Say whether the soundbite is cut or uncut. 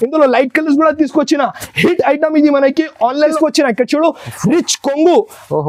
cut